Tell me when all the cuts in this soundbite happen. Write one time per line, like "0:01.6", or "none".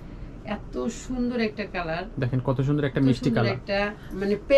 none